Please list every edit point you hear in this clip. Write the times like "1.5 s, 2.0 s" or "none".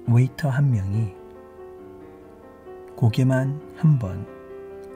none